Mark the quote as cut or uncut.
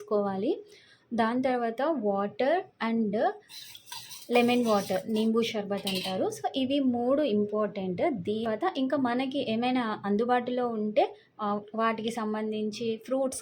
cut